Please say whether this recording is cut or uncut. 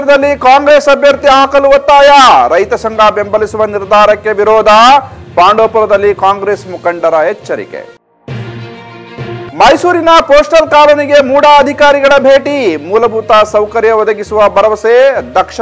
uncut